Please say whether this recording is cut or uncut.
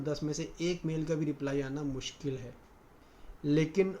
cut